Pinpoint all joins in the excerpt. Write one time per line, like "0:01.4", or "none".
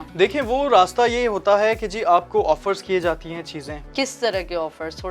0:03.8